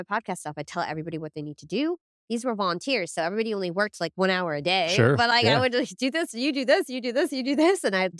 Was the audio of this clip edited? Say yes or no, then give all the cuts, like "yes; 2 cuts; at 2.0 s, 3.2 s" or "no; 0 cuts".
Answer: no; 0 cuts